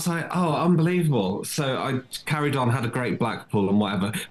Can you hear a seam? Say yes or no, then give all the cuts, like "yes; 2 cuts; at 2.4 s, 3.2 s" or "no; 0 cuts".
no; 0 cuts